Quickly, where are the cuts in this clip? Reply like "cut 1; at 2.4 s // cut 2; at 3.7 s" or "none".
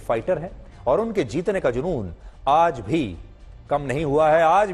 none